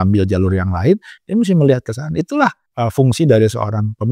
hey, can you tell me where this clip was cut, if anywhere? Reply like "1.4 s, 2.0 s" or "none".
2.6 s